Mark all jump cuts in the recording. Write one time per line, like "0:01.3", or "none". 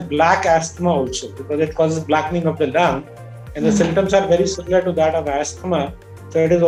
none